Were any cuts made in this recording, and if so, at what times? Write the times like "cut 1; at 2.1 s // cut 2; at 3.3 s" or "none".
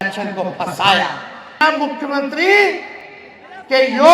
cut 1; at 1.6 s

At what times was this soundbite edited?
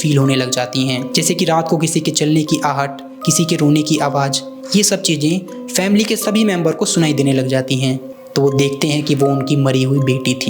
cut 1; at 8.0 s

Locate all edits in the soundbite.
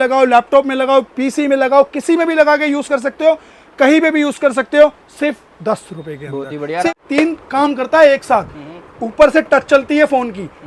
cut 1; at 6.9 s

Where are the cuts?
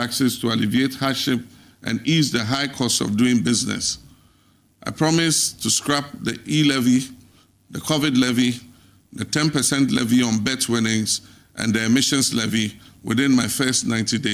none

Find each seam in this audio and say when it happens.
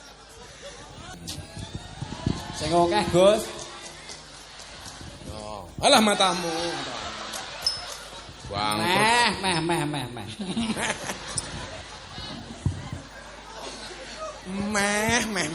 cut 1; at 1.1 s

